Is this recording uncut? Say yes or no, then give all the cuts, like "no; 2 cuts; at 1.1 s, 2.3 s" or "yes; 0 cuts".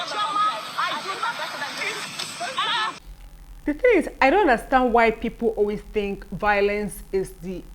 no; 1 cut; at 2.9 s